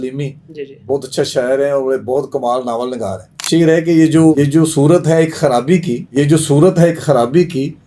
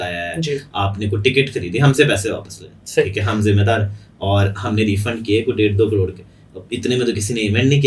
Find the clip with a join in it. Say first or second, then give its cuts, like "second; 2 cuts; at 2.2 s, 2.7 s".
first; 3 cuts; at 3.4 s, 4.3 s, 6.0 s